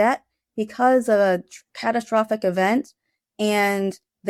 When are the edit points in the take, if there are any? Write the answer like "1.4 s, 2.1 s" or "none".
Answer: none